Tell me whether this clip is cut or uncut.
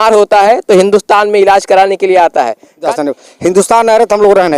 cut